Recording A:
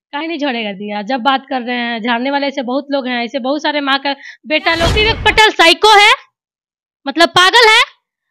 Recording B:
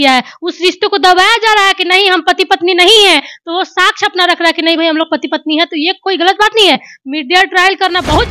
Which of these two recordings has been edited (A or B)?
A